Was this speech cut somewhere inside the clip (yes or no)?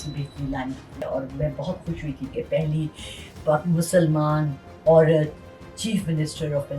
yes